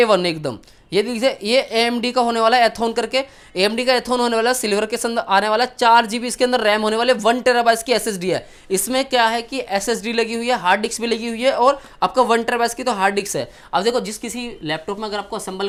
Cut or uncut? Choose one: uncut